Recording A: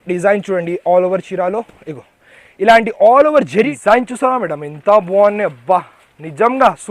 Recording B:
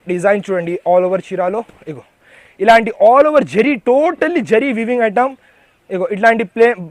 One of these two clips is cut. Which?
A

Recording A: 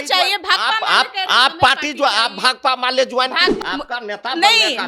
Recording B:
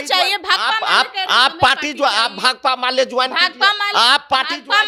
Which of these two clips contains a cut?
A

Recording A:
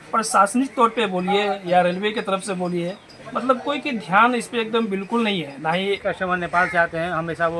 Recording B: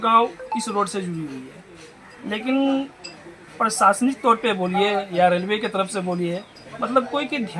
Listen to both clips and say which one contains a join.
A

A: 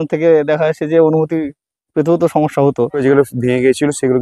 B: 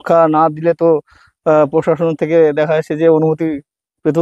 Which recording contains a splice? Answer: A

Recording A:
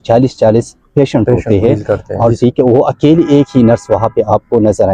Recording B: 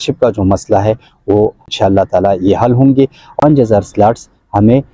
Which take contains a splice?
B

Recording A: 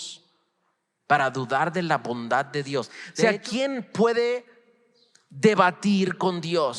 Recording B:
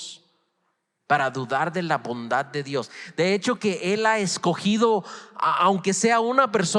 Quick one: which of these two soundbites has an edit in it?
A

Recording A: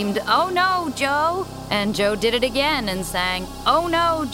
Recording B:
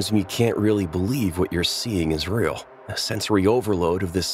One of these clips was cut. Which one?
A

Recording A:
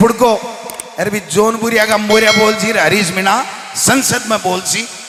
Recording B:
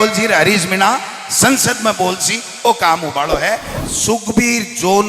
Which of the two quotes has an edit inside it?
B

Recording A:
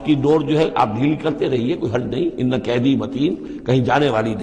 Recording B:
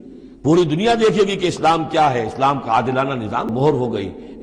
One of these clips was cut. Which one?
B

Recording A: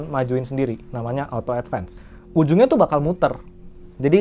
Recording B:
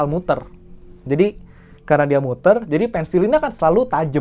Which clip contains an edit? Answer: A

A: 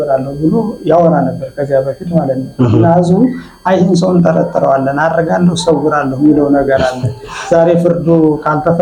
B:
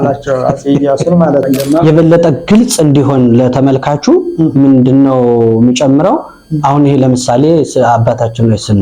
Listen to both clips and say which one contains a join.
B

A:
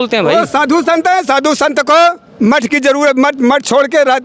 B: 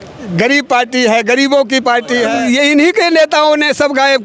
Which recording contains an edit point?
B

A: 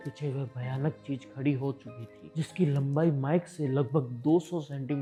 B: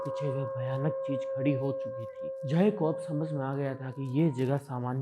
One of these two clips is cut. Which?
B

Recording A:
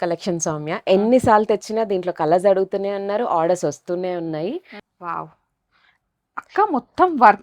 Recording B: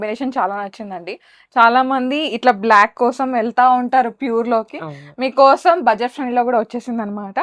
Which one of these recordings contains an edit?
A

